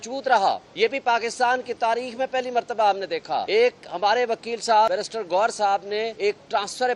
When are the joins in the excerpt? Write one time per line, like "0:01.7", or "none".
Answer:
0:01.0
0:03.4
0:04.9
0:06.1